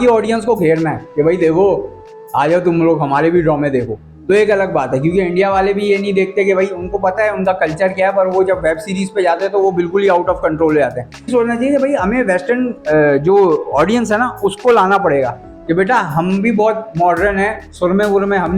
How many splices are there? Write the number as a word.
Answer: one